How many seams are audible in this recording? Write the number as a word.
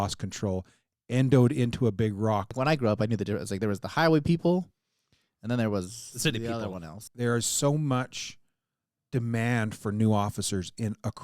two